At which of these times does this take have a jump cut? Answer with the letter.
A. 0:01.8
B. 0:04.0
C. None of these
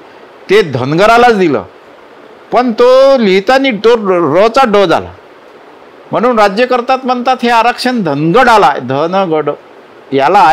C